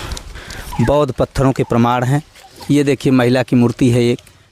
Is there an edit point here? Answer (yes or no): yes